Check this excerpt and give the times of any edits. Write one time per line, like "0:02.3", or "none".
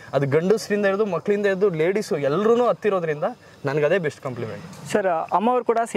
none